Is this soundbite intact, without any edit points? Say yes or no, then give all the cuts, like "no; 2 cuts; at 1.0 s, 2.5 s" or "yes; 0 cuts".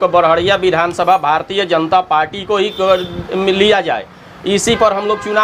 yes; 0 cuts